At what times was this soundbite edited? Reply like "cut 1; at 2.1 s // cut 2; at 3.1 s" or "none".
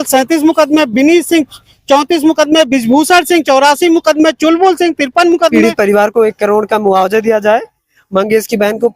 cut 1; at 5.6 s